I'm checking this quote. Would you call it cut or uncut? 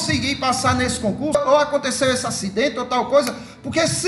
cut